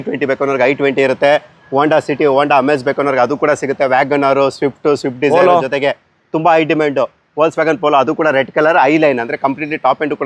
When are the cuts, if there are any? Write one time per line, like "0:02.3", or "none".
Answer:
none